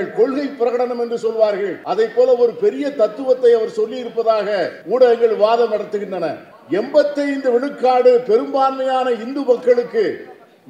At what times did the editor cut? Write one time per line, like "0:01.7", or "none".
0:01.8
0:04.8
0:06.5